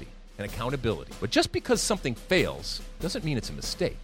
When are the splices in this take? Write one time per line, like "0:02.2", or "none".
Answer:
0:01.1